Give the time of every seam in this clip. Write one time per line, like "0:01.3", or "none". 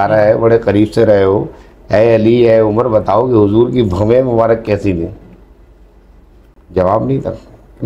0:06.8